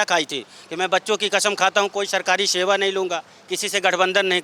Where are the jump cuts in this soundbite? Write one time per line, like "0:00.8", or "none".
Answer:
none